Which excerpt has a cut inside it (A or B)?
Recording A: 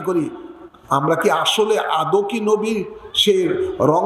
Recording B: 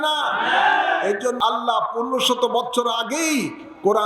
B